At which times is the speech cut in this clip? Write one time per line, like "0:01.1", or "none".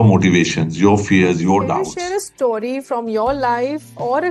0:01.9